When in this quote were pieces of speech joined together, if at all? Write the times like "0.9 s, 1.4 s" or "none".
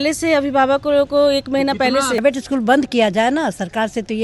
2.2 s